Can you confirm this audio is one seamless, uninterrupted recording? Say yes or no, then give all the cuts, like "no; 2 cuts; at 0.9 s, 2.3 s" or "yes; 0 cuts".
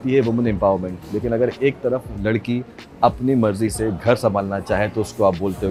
yes; 0 cuts